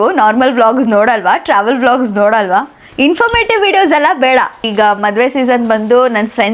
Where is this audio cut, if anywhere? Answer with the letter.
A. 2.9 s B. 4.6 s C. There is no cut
B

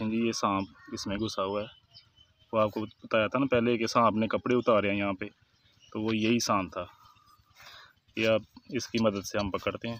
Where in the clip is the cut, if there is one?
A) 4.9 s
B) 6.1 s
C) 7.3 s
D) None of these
D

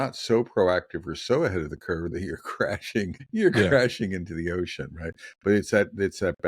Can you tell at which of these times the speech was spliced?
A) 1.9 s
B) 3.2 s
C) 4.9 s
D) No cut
B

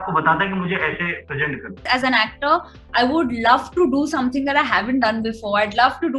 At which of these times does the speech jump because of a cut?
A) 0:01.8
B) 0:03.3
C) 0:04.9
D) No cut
A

